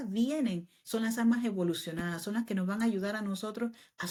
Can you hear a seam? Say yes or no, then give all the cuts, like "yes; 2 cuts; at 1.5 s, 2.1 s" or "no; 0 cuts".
no; 0 cuts